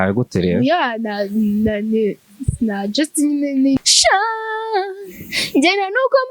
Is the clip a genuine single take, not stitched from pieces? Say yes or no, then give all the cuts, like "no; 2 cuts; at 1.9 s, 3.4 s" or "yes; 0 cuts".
no; 1 cut; at 3.8 s